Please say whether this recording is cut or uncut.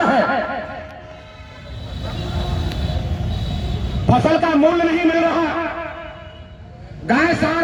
uncut